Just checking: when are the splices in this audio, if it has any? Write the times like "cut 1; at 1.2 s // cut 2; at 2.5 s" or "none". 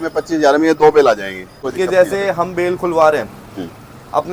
cut 1; at 1.6 s